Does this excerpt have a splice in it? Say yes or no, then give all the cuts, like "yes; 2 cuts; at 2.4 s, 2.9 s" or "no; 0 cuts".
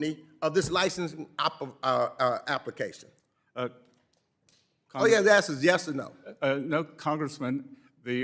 no; 0 cuts